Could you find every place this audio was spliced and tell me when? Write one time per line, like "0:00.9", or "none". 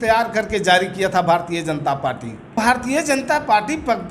0:02.5